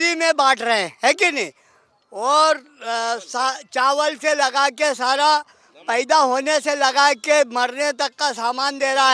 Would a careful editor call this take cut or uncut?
uncut